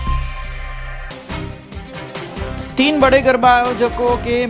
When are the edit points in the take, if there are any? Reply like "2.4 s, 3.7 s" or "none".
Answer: 1.8 s